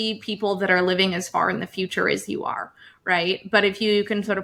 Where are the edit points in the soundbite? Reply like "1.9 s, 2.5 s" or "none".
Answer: none